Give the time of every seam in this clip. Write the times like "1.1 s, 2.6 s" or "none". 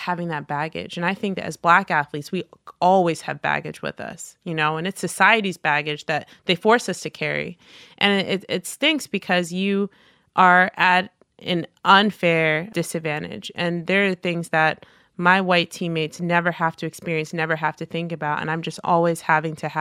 12.7 s, 18.8 s

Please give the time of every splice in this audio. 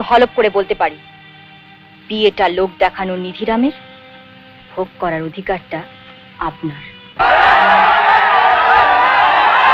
none

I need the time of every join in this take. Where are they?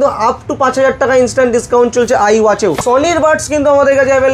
2.8 s

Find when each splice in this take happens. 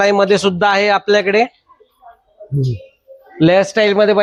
none

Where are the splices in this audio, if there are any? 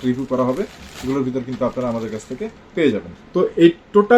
3.1 s

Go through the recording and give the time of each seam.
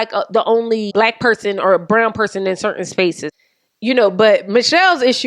0.9 s, 3.3 s

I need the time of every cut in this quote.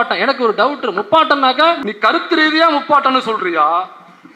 1.9 s

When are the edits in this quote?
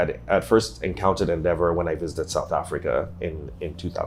none

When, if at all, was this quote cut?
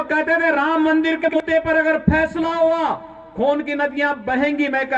1.3 s

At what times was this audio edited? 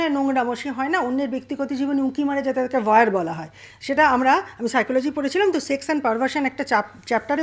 none

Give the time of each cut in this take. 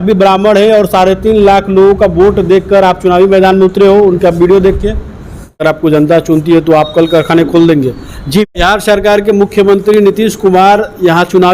5.6 s, 8.5 s

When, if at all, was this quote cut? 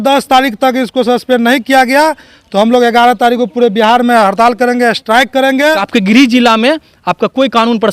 5.8 s

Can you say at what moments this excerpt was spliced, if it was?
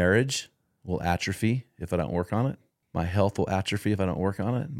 2.7 s

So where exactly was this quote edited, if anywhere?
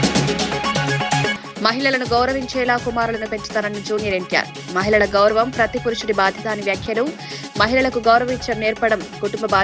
1.3 s

